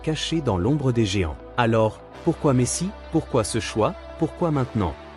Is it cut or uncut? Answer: cut